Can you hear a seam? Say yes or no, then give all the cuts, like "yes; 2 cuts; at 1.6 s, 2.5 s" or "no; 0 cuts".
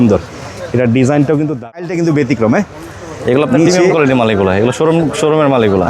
yes; 1 cut; at 1.8 s